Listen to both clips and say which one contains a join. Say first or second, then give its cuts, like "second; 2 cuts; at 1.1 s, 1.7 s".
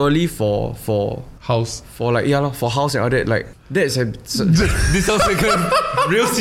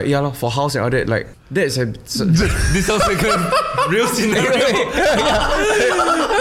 first; 1 cut; at 1.3 s